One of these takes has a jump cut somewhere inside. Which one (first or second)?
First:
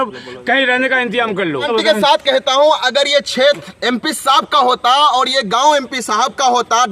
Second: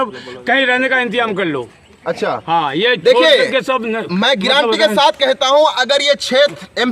first